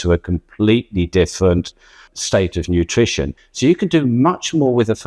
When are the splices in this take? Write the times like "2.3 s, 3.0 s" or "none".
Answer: 2.1 s, 3.4 s